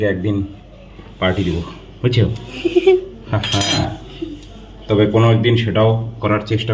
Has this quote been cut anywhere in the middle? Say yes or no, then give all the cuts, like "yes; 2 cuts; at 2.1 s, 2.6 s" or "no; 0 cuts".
yes; 1 cut; at 3.8 s